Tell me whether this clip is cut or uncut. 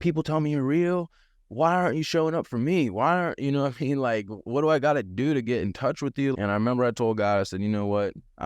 cut